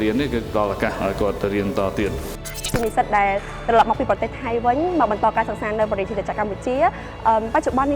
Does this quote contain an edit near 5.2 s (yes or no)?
no